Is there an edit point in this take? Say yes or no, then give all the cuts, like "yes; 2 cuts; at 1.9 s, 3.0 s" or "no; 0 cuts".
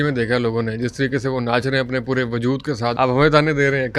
yes; 1 cut; at 2.9 s